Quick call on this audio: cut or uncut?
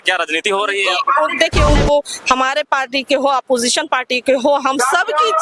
cut